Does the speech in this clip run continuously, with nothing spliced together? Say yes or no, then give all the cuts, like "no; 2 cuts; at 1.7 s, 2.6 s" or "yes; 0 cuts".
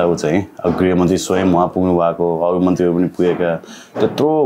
yes; 0 cuts